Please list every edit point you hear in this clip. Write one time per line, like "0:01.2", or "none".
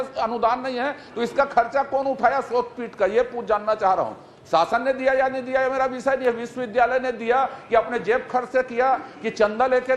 none